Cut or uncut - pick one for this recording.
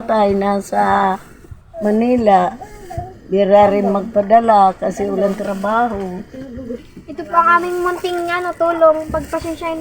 cut